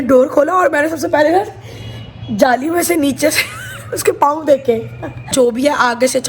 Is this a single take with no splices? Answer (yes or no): no